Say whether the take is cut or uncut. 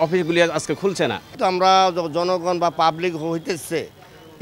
uncut